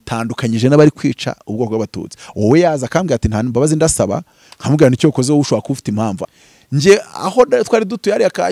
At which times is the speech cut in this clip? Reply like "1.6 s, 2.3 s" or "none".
6.2 s